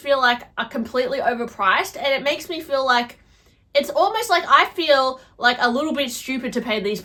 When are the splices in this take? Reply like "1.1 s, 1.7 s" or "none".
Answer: none